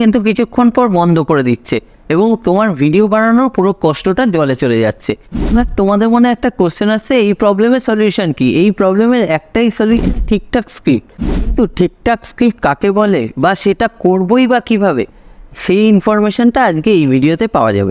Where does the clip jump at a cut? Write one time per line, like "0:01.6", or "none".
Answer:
none